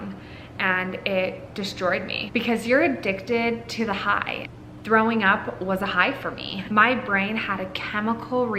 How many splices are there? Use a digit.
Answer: 1